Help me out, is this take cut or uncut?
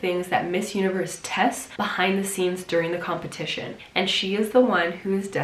cut